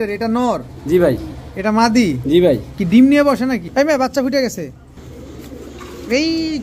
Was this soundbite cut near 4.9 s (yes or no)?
yes